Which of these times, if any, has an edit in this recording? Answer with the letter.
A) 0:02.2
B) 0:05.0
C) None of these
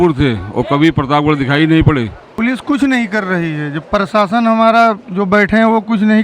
A